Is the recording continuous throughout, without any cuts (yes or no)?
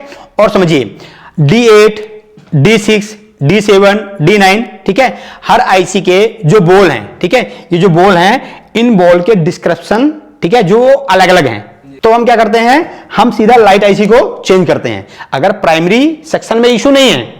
no